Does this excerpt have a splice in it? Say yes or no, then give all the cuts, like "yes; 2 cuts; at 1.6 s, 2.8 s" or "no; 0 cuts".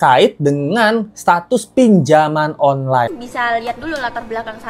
yes; 1 cut; at 3.1 s